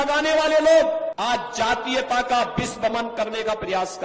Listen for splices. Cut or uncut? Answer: cut